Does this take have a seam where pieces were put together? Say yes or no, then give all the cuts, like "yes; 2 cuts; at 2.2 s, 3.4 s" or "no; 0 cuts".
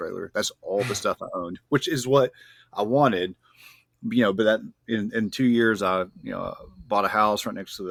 no; 0 cuts